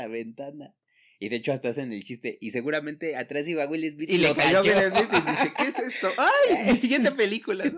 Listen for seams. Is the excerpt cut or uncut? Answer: uncut